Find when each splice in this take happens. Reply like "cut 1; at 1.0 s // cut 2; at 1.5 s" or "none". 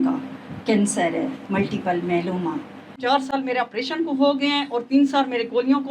cut 1; at 2.9 s